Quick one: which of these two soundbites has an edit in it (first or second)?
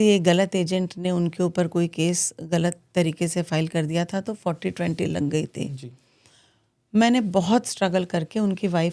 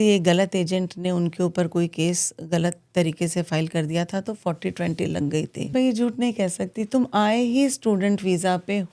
second